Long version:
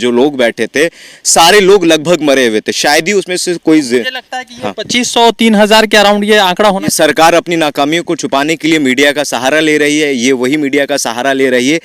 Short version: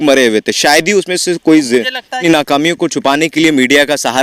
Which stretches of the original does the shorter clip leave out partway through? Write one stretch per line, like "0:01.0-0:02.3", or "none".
0:04.4-0:07.5